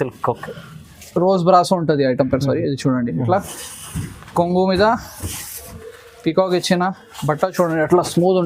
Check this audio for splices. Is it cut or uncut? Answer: uncut